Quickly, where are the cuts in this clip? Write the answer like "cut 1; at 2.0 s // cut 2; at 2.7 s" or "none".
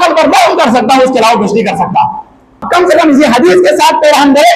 cut 1; at 2.7 s

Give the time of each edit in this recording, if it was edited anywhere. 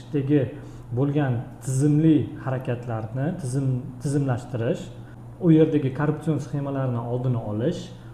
none

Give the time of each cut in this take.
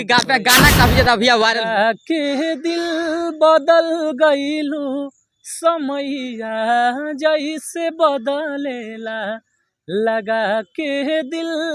cut 1; at 1.6 s

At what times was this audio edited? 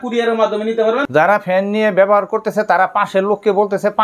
cut 1; at 1.1 s

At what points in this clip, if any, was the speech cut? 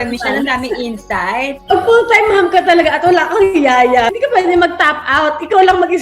cut 1; at 1.6 s // cut 2; at 4.1 s

